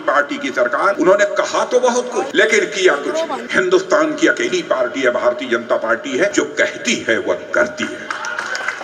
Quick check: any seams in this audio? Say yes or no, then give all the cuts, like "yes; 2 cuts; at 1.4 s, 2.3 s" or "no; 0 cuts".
yes; 4 cuts; at 1.0 s, 2.3 s, 3.4 s, 6.3 s